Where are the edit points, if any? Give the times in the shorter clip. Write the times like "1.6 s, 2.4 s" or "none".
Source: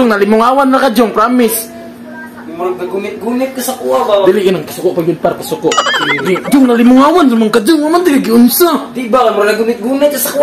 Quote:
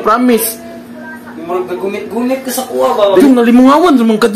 3.2 s